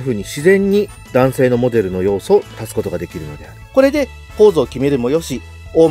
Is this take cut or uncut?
cut